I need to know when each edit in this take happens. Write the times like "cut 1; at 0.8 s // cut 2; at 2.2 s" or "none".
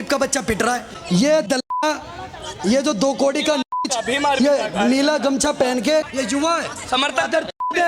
cut 1; at 0.9 s // cut 2; at 6.1 s